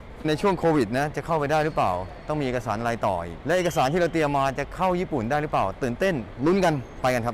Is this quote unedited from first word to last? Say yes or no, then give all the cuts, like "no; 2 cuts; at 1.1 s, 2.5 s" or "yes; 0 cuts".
yes; 0 cuts